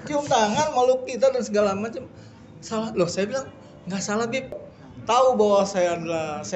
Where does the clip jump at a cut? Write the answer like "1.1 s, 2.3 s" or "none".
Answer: 4.6 s